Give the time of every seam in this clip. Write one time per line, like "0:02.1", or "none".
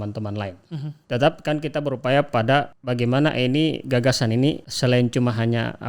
0:01.0
0:02.8
0:04.7